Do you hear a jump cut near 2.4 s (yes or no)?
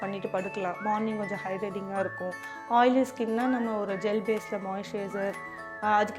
no